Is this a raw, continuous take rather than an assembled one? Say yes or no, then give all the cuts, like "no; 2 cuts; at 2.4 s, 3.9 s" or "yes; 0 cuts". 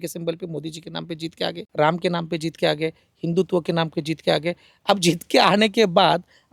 no; 1 cut; at 1.6 s